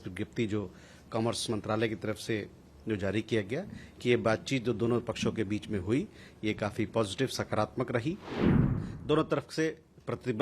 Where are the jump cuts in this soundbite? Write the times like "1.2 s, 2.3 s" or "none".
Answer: 8.6 s